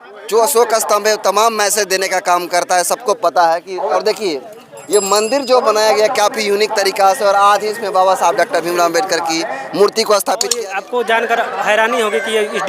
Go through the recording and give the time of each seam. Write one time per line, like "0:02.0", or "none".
0:03.9
0:10.5